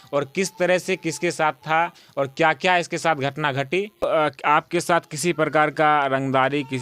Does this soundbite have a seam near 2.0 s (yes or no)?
no